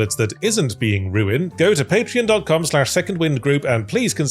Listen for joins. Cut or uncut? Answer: cut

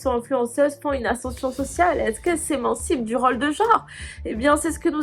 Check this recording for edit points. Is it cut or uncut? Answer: uncut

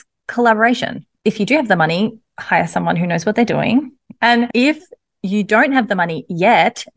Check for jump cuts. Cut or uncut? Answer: cut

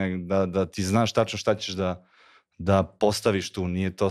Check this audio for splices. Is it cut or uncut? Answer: uncut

